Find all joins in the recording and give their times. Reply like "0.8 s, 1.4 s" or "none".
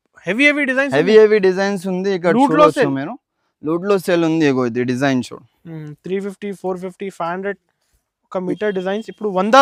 none